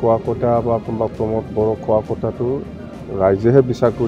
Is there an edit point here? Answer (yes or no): no